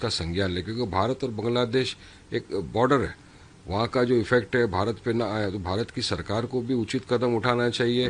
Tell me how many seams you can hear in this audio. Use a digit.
0